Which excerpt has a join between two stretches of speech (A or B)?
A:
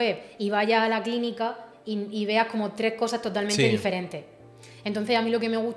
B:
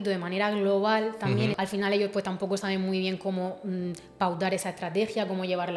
B